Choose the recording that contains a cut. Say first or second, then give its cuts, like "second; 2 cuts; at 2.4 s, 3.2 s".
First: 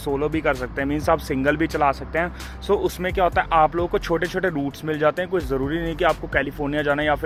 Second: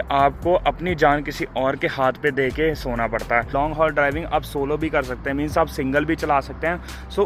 second; 1 cut; at 3.5 s